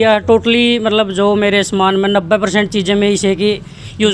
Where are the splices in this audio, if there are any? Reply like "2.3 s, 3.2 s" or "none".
none